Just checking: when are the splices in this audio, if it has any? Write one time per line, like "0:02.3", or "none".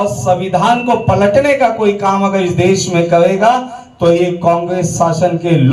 none